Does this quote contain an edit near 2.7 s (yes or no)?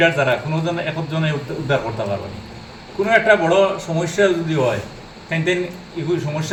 no